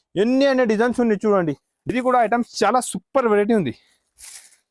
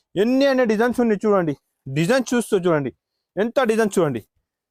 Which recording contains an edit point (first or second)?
first